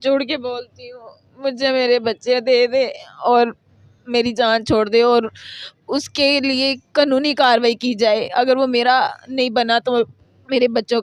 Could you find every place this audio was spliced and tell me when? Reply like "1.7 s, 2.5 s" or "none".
none